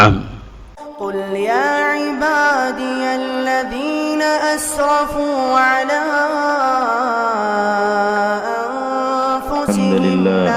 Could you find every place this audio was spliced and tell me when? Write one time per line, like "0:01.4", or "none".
0:01.2